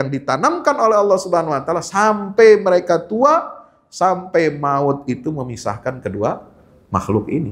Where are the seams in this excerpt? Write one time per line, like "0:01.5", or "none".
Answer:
none